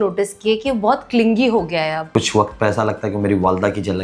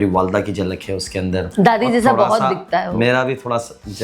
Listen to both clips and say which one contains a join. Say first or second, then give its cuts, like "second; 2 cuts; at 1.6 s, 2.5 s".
first; 1 cut; at 2.1 s